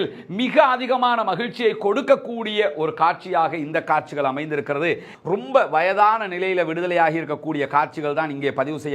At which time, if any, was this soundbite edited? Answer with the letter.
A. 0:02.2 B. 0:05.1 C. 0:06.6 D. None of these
B